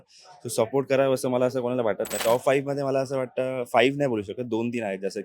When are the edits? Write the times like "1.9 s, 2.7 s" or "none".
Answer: 2.2 s